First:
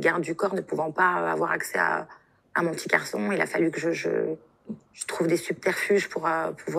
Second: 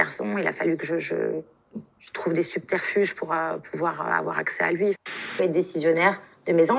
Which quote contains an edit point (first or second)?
second